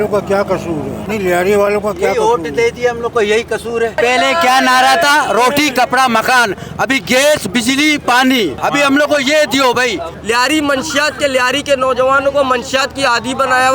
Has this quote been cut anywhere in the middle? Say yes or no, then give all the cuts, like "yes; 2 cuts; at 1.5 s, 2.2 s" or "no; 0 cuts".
yes; 3 cuts; at 1.0 s, 3.9 s, 10.1 s